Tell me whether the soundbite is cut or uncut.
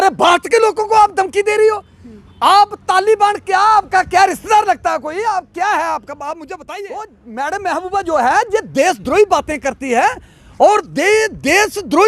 cut